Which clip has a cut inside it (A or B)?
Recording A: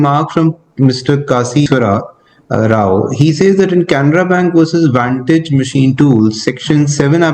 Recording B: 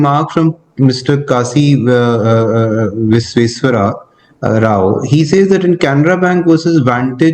A